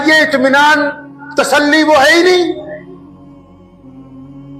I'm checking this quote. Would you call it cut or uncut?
uncut